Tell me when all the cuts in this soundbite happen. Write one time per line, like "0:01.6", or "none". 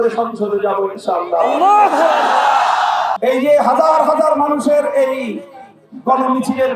0:03.1